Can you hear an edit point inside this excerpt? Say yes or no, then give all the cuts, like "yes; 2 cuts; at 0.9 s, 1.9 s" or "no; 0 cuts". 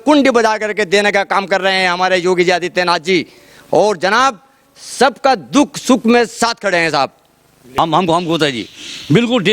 yes; 1 cut; at 7.8 s